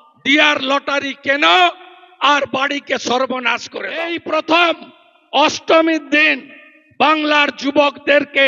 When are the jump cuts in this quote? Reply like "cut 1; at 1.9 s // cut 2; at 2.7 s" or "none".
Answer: cut 1; at 4.1 s